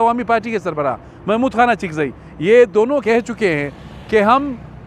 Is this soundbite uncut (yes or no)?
no